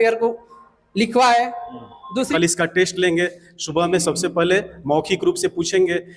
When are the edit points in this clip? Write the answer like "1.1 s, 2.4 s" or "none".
2.3 s